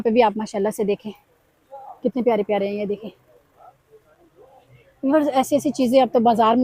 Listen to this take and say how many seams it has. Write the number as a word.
zero